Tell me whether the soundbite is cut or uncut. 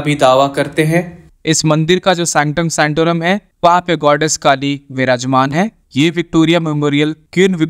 cut